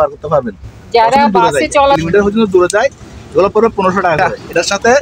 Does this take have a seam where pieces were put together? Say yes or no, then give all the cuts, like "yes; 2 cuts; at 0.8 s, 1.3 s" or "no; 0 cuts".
yes; 2 cuts; at 2.0 s, 4.2 s